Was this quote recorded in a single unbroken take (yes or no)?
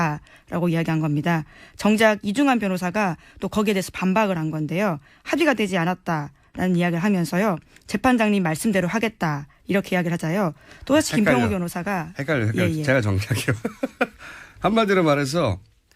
no